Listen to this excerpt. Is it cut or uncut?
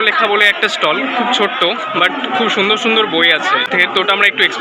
cut